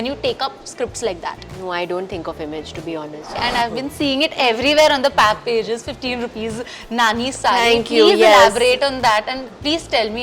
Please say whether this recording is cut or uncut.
cut